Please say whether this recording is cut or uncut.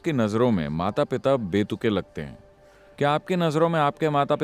cut